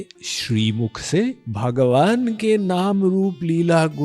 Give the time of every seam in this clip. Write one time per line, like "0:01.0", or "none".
0:01.5